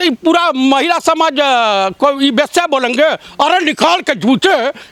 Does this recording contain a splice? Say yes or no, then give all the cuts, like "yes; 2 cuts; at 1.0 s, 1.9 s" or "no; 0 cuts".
no; 0 cuts